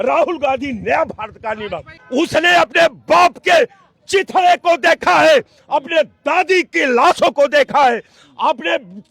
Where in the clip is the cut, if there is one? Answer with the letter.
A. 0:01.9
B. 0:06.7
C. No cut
A